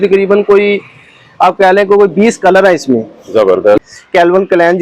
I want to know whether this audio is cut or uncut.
cut